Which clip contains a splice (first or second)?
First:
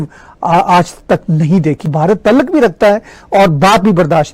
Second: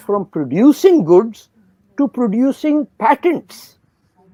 first